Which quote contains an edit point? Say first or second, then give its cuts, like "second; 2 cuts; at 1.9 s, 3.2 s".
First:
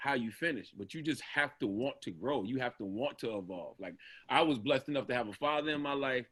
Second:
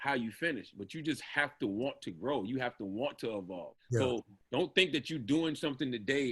second; 1 cut; at 3.7 s